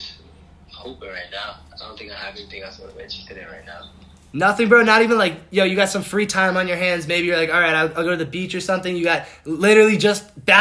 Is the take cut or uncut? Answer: uncut